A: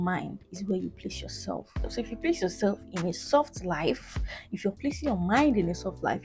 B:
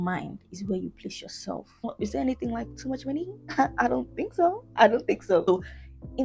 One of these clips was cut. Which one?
B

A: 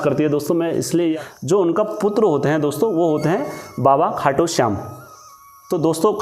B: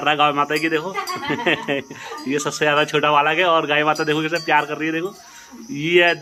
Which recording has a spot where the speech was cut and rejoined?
A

